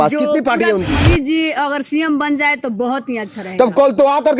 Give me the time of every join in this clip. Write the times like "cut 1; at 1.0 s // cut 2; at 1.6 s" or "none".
cut 1; at 0.9 s